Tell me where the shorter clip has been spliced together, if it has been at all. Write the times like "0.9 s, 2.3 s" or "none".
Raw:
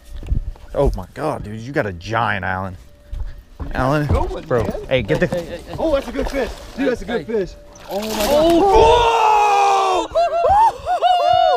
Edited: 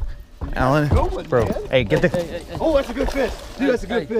none